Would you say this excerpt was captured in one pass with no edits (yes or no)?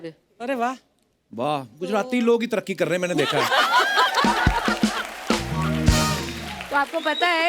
yes